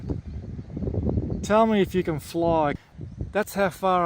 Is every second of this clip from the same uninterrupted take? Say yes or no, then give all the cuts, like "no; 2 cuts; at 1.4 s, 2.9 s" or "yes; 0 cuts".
no; 1 cut; at 2.8 s